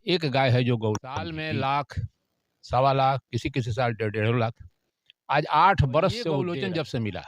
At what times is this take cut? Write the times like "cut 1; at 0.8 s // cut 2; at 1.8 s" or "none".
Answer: cut 1; at 1.3 s // cut 2; at 6.4 s